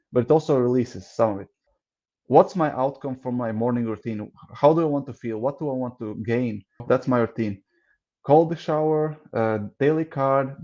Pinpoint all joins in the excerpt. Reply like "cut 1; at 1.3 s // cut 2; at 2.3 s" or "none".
cut 1; at 1.7 s // cut 2; at 6.8 s

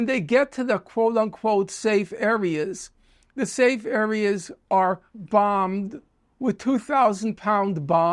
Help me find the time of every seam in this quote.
none

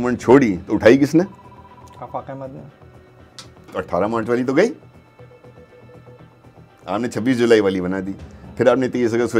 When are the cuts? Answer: none

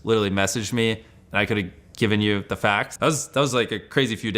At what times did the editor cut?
cut 1; at 2.9 s

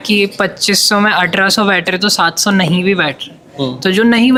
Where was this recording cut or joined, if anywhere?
none

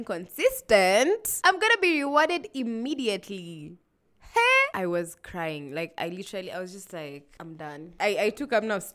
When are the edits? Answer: cut 1; at 1.3 s // cut 2; at 4.7 s // cut 3; at 7.9 s

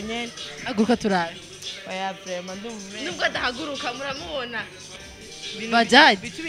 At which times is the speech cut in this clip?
cut 1; at 4.8 s

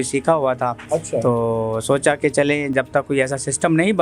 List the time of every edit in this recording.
none

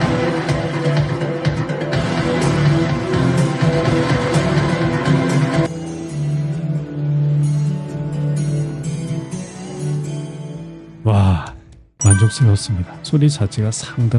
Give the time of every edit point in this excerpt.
cut 1; at 5.7 s // cut 2; at 12.9 s

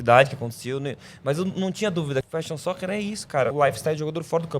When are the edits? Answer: cut 1; at 2.3 s // cut 2; at 3.5 s

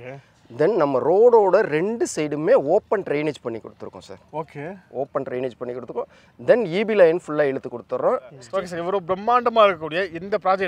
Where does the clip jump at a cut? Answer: cut 1; at 8.4 s

